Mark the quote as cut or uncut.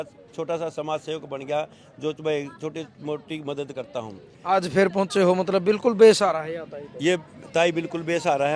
uncut